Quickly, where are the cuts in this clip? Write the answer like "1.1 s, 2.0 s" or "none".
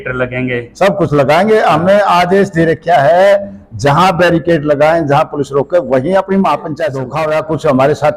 7.0 s